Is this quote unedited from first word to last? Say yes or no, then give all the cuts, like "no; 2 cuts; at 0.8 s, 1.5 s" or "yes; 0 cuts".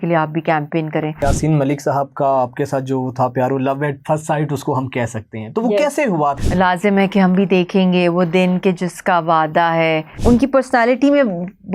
no; 3 cuts; at 1.2 s, 6.4 s, 10.1 s